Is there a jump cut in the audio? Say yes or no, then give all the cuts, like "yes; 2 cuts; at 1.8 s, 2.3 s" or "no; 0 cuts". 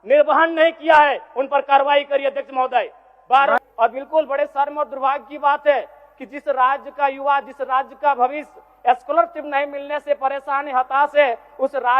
yes; 1 cut; at 3.6 s